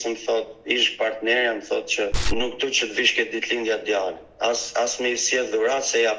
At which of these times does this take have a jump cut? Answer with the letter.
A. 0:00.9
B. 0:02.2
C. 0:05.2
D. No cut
B